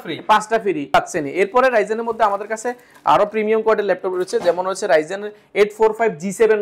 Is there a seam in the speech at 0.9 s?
yes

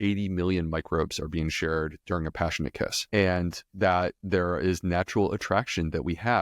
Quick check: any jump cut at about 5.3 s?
no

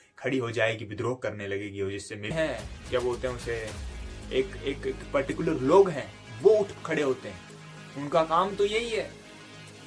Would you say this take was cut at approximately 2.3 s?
yes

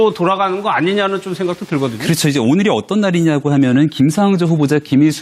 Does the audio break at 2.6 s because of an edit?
yes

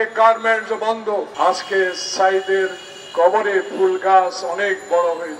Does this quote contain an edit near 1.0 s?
yes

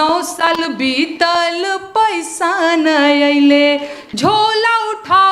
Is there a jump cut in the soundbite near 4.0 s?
yes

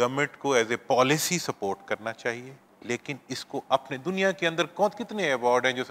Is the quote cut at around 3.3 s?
no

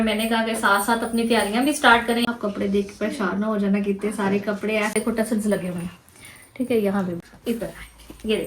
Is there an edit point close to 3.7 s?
no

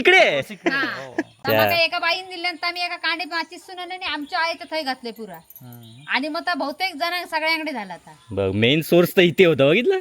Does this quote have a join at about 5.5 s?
no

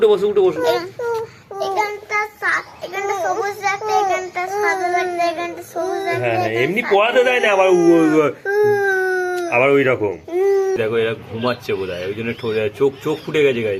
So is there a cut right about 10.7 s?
yes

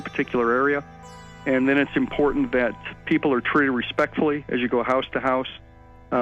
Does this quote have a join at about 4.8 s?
no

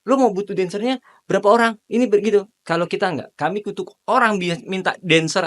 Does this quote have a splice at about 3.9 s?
yes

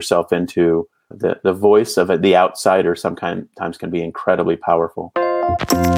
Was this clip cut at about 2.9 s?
no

